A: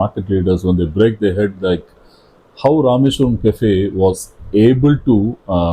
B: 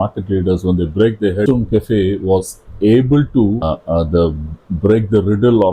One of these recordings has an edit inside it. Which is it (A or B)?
B